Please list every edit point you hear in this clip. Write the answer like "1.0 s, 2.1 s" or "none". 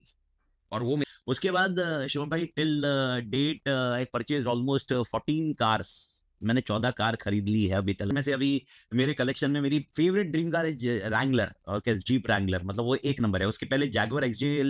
1.0 s, 8.1 s